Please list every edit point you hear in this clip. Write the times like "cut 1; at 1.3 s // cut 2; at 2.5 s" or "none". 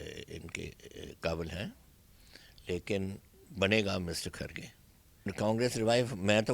cut 1; at 5.3 s